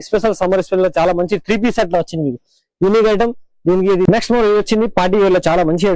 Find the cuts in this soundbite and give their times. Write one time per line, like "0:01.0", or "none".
0:04.0